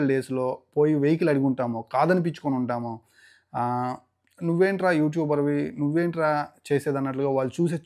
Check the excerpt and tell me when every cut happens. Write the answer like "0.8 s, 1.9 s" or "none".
none